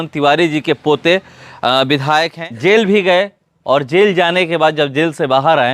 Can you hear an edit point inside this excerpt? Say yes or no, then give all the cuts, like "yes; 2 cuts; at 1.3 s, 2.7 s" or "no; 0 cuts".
yes; 1 cut; at 2.4 s